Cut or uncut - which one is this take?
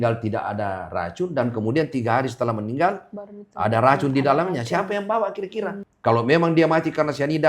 cut